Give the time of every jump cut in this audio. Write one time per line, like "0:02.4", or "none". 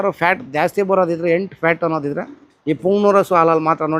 none